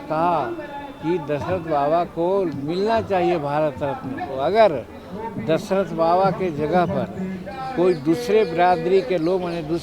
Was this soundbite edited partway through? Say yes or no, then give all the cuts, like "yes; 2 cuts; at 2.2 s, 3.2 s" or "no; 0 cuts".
yes; 1 cut; at 4.3 s